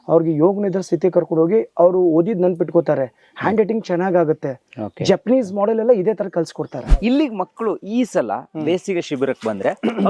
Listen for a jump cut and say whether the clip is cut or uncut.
cut